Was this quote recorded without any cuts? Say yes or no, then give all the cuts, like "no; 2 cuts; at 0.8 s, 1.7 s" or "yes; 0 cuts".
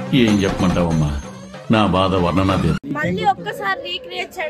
no; 1 cut; at 2.9 s